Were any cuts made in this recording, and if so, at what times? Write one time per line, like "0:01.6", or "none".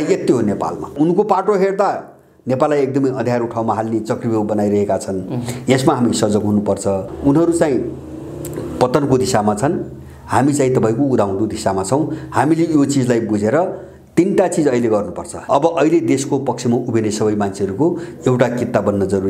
0:00.9
0:07.1
0:15.3